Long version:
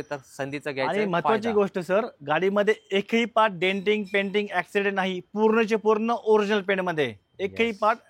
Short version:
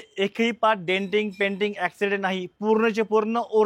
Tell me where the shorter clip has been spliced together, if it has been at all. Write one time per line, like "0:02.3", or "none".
none